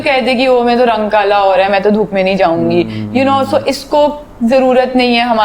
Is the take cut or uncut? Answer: uncut